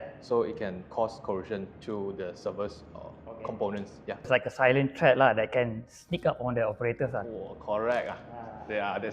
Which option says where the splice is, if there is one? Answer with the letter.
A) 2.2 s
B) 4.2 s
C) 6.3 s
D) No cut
B